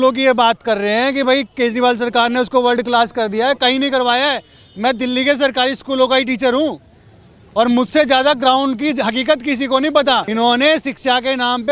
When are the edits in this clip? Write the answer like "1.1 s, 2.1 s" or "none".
10.3 s